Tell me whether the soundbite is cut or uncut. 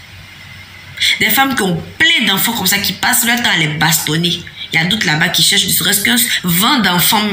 uncut